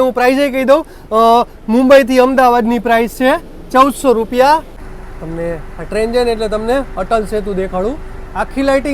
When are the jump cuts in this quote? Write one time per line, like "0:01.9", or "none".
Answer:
0:04.7